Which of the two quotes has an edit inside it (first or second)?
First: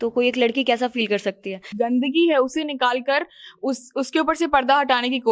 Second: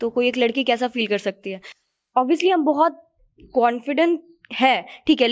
first